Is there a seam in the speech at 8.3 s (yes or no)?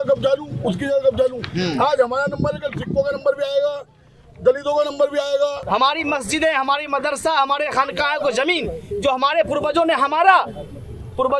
no